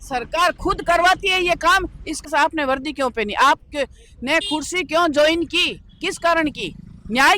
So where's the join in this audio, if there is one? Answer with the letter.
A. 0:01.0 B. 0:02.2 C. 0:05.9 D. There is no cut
B